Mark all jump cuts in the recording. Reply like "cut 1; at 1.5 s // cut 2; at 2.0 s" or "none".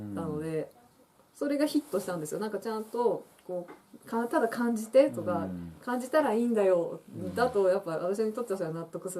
cut 1; at 0.9 s